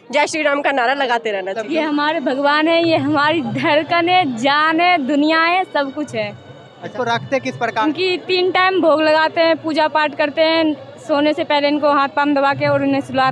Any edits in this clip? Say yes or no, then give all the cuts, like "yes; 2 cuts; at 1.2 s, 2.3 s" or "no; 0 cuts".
yes; 2 cuts; at 1.6 s, 6.9 s